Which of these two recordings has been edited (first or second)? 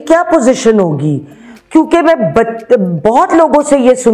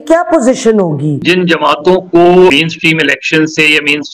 second